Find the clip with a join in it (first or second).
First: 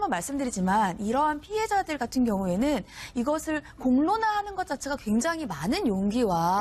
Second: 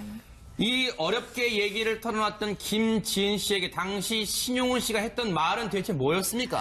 first